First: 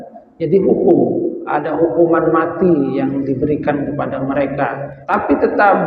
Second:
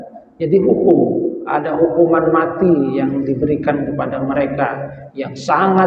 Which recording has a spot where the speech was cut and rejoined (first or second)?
first